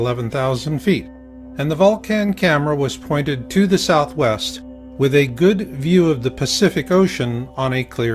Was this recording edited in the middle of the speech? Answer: yes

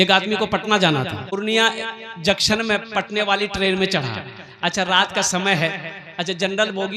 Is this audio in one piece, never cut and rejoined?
no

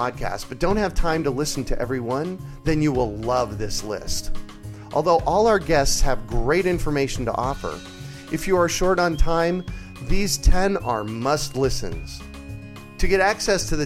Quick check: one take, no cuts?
yes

